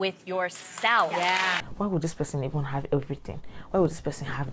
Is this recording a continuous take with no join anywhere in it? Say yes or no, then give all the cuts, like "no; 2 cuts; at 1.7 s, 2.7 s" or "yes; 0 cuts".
no; 1 cut; at 1.5 s